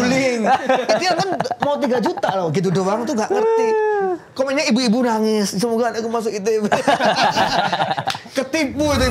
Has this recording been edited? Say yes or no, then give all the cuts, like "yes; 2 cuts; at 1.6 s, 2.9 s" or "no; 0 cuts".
no; 0 cuts